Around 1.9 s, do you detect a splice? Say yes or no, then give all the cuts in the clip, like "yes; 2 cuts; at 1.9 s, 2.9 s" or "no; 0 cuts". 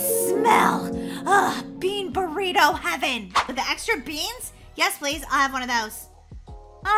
no; 1 cut; at 3.4 s